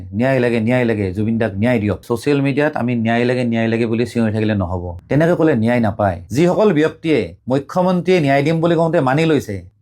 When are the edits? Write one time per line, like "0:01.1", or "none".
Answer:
0:02.0
0:05.0
0:06.2